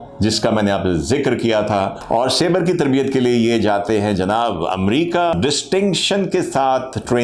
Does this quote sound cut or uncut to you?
cut